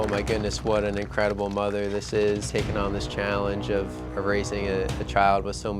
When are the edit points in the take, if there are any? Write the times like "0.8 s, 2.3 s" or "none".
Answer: 2.5 s